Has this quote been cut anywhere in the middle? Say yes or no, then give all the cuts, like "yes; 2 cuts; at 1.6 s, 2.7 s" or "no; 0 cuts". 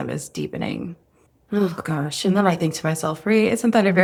no; 0 cuts